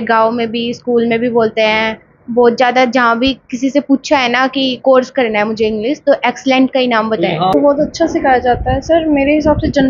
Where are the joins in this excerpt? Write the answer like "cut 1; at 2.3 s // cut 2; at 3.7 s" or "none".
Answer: cut 1; at 7.5 s